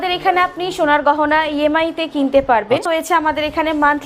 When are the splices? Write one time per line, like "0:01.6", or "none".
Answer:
0:02.9